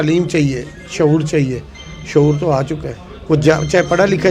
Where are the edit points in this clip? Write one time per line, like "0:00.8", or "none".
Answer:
none